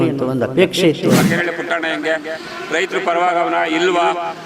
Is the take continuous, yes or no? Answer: no